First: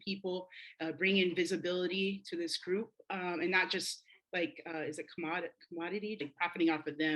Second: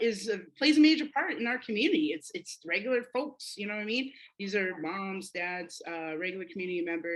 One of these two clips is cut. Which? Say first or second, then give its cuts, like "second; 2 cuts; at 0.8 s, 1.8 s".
first; 1 cut; at 6.2 s